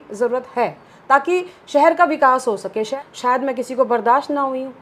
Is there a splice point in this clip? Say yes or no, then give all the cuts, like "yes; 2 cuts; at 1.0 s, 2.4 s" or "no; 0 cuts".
yes; 1 cut; at 2.9 s